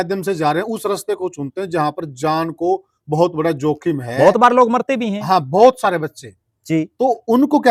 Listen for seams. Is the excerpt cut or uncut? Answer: uncut